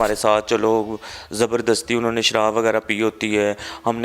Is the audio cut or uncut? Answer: uncut